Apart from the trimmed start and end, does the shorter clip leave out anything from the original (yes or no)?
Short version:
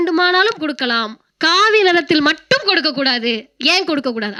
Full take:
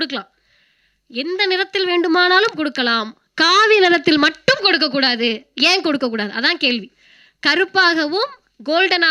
no